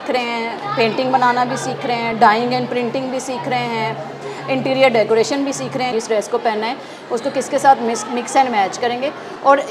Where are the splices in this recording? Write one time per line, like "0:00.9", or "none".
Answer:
0:05.9